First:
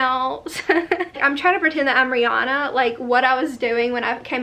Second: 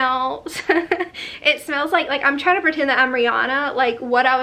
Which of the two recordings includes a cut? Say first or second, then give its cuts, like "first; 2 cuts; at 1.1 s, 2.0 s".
first; 1 cut; at 1.2 s